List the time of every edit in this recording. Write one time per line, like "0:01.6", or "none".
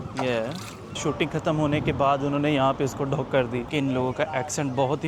0:00.9
0:03.7